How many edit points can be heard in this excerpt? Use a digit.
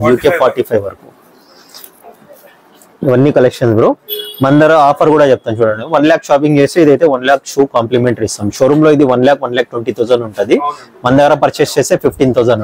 0